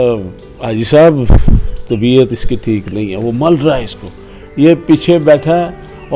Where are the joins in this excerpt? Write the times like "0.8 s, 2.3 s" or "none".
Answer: none